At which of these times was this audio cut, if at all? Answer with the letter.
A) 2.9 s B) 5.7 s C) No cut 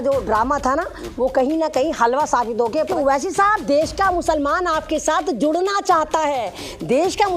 A